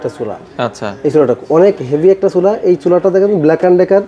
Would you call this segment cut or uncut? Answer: uncut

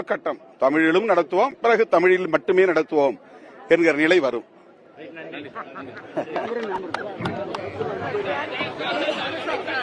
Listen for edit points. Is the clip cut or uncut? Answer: uncut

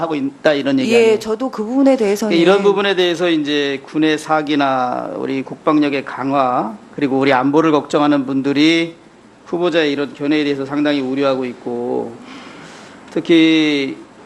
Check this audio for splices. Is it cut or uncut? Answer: cut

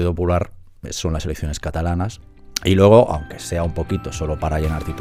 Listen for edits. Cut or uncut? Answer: uncut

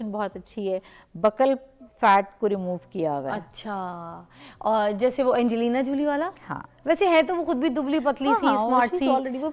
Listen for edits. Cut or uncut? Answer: uncut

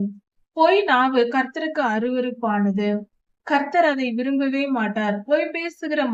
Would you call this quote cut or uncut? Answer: uncut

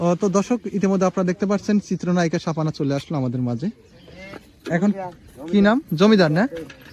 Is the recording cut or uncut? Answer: cut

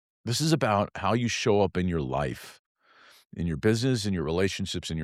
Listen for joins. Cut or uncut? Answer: uncut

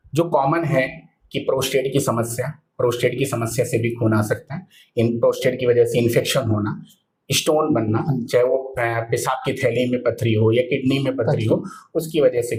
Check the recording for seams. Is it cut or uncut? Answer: uncut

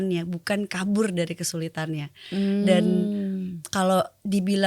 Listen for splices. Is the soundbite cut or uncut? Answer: uncut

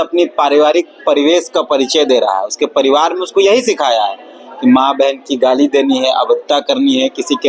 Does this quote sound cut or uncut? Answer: uncut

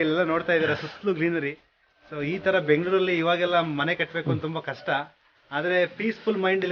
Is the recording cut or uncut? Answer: uncut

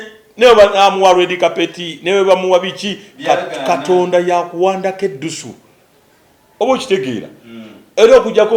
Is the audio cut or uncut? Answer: uncut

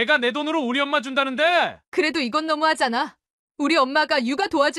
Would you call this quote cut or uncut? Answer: cut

